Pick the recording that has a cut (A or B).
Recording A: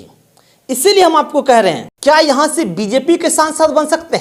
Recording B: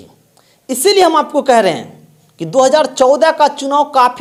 A